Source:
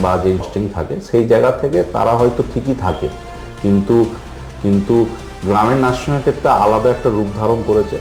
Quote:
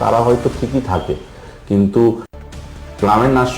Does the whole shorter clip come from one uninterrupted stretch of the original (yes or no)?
no